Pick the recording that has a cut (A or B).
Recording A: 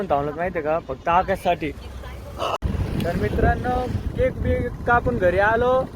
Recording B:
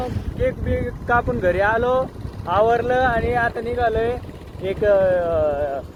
A